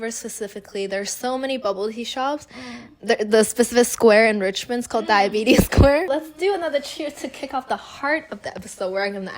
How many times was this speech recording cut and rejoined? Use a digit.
1